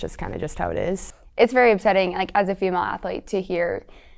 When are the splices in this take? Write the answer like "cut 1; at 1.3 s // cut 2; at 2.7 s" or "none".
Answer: cut 1; at 1.0 s